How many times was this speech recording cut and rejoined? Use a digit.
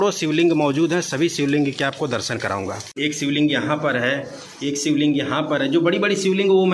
1